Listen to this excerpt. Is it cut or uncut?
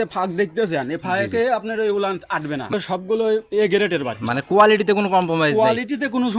cut